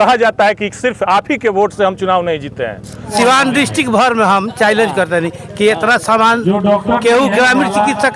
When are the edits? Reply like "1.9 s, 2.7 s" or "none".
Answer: 3.1 s